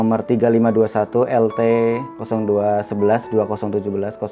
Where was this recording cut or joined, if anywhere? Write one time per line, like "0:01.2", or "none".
0:02.1